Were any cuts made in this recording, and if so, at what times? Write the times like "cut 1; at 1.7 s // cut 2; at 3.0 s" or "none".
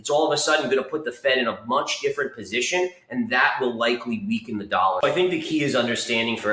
cut 1; at 5.0 s